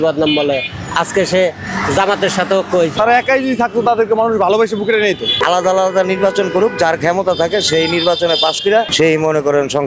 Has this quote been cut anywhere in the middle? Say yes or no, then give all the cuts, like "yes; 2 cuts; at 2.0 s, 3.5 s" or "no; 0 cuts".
yes; 3 cuts; at 2.9 s, 5.3 s, 8.9 s